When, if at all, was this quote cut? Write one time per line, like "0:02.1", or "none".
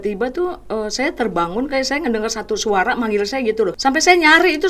0:03.8